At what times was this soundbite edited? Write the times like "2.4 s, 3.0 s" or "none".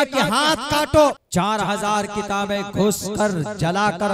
1.2 s